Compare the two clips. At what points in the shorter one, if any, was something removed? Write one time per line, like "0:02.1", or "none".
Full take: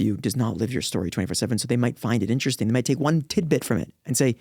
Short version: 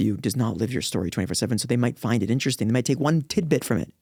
none